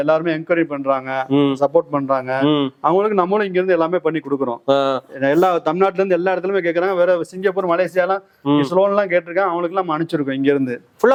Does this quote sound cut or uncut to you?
uncut